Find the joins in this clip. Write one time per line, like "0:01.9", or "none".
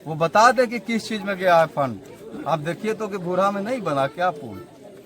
none